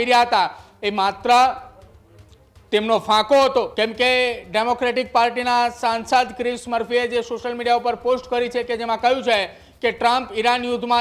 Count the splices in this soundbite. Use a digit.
1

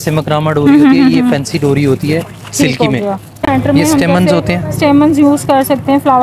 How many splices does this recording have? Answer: 1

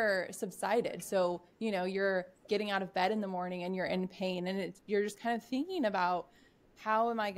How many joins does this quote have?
0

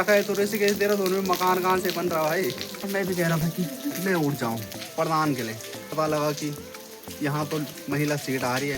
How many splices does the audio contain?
3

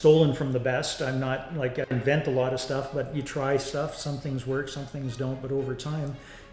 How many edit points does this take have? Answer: 1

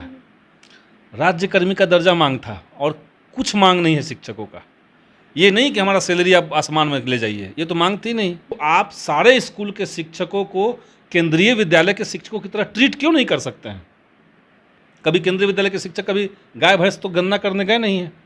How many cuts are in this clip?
1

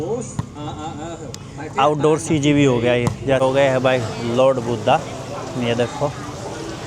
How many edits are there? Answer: 1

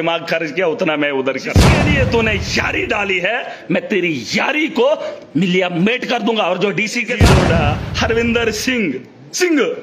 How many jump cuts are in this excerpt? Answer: 2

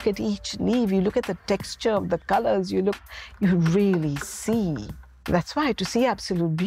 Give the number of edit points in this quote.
1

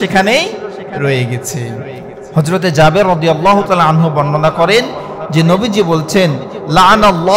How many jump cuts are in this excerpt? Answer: 1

